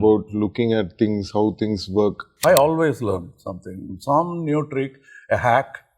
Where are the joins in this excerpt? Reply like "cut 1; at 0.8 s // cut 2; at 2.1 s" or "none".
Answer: cut 1; at 2.3 s